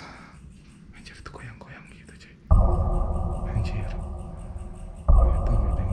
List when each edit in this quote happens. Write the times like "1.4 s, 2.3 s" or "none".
2.4 s